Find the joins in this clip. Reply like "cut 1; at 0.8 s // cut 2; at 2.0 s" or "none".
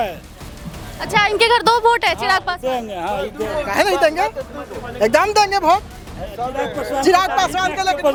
none